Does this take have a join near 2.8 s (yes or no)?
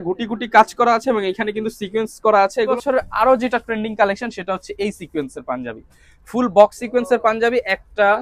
yes